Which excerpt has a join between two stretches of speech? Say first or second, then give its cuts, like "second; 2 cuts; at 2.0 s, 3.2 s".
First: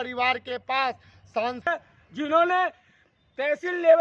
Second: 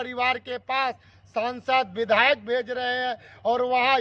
first; 1 cut; at 1.7 s